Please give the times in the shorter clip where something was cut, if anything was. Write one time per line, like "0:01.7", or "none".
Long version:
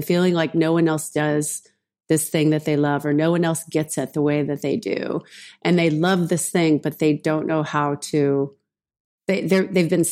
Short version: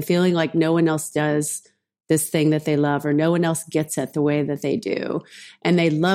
none